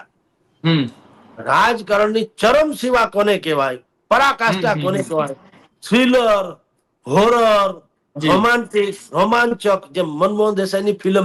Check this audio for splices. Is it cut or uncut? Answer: uncut